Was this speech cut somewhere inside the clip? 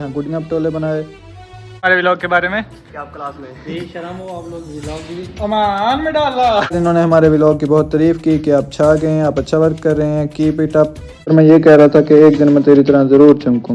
yes; 3 cuts; at 1.8 s, 6.8 s, 11.3 s

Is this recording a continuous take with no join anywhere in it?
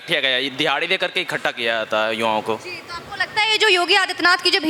yes; 0 cuts

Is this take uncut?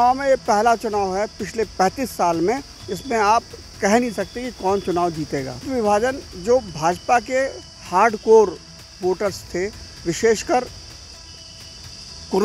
no; 1 cut; at 5.7 s

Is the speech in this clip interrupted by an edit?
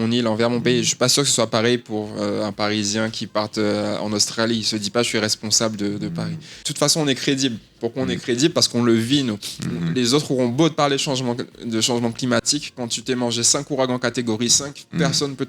yes; 1 cut; at 6.7 s

